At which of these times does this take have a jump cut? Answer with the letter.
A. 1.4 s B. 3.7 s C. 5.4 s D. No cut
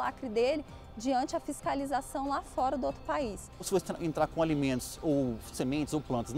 B